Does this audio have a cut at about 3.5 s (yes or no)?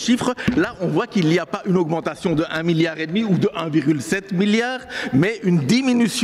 no